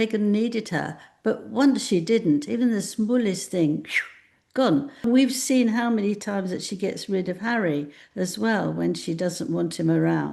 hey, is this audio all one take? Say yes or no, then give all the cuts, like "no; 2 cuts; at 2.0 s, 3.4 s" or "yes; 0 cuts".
no; 1 cut; at 5.0 s